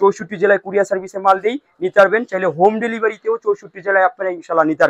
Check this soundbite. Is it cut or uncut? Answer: uncut